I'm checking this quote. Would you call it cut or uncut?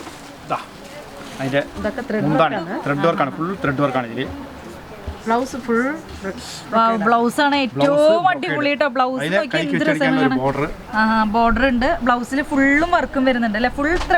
uncut